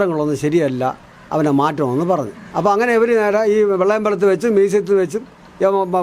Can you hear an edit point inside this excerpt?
yes; 1 cut; at 2.5 s

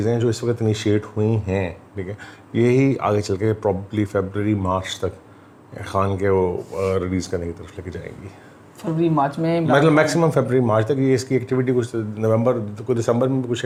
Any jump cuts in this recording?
no; 0 cuts

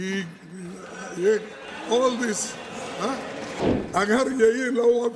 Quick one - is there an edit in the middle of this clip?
yes; 1 cut; at 3.6 s

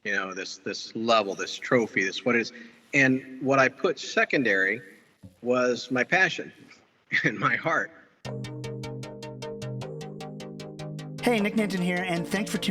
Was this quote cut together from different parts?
yes; 1 cut; at 8.1 s

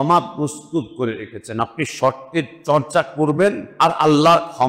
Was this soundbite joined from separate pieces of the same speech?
yes; 1 cut; at 3.7 s

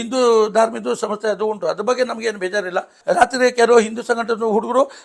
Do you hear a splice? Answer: yes; 1 cut; at 3.0 s

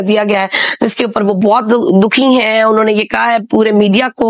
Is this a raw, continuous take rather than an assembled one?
yes; 0 cuts

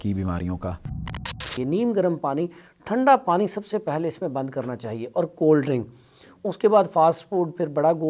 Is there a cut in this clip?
yes; 1 cut; at 1.4 s

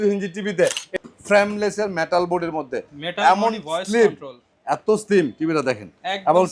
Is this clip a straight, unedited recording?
no; 1 cut; at 0.9 s

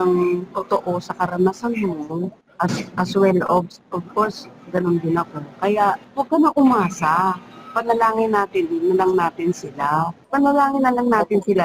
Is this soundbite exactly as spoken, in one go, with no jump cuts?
no; 3 cuts; at 2.4 s, 6.0 s, 10.2 s

